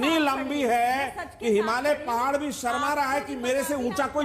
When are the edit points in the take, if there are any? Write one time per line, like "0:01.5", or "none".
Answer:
none